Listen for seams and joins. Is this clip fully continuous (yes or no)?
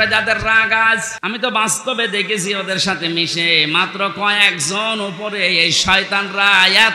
no